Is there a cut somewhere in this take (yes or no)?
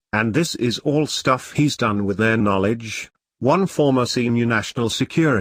no